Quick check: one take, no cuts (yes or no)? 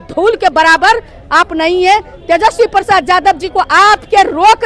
yes